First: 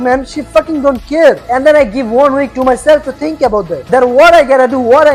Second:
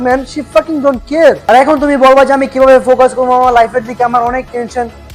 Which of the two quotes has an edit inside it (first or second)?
second